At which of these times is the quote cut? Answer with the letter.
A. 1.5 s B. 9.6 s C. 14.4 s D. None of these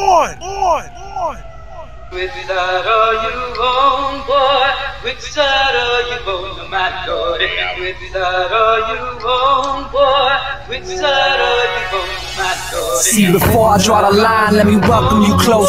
A